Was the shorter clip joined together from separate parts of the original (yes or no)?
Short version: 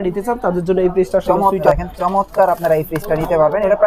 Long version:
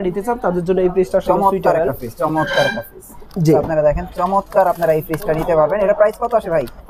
yes